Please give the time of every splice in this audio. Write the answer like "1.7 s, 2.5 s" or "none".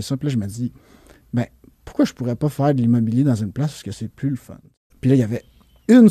4.9 s